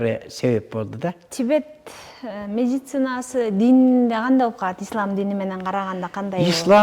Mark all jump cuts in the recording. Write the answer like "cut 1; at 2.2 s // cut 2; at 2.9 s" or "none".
cut 1; at 1.3 s